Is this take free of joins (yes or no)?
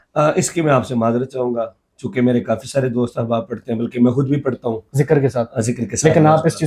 yes